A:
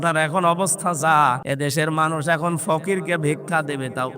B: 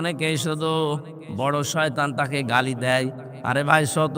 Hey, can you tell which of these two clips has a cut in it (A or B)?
A